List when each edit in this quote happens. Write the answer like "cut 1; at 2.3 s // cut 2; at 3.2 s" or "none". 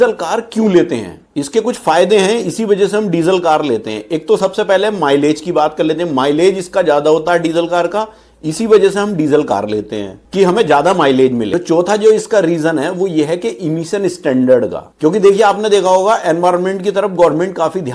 cut 1; at 11.5 s